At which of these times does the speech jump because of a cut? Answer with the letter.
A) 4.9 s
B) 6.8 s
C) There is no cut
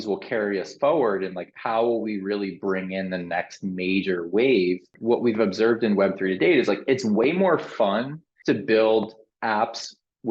A